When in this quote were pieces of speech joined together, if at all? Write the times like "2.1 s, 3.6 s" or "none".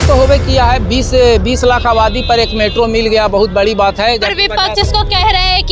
none